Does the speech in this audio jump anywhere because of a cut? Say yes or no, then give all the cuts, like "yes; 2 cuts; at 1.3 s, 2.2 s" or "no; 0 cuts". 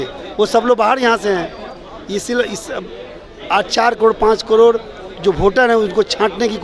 no; 0 cuts